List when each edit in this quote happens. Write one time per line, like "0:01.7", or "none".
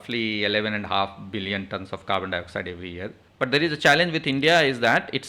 0:03.2